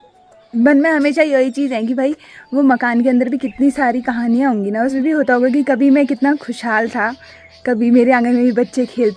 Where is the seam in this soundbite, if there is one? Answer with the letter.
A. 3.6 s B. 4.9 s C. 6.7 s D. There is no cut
B